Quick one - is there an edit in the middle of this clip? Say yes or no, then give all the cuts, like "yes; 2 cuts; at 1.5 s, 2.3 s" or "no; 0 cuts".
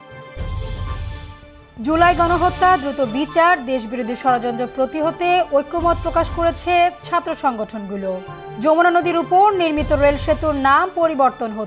yes; 1 cut; at 1.1 s